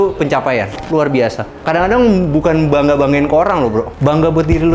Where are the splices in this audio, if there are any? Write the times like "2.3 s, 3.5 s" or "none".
1.5 s, 3.9 s